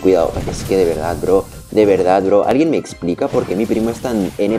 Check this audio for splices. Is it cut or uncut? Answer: uncut